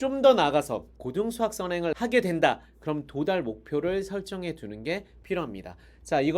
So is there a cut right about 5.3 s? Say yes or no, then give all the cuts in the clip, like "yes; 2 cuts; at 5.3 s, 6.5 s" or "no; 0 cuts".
no; 2 cuts; at 0.9 s, 1.9 s